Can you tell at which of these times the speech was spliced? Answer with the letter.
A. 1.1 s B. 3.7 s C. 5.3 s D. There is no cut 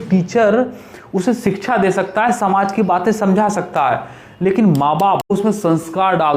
C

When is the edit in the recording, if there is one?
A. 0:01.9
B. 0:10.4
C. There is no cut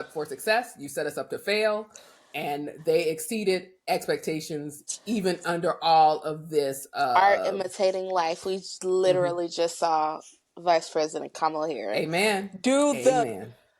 C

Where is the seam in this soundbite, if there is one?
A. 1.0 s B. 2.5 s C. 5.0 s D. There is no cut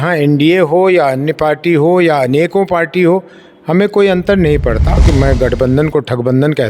C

